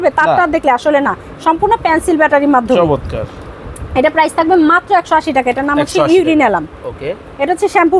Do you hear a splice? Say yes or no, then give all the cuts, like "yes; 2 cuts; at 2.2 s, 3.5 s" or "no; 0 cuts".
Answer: no; 0 cuts